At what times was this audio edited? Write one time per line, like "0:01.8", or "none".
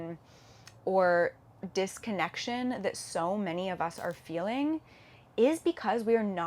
0:01.5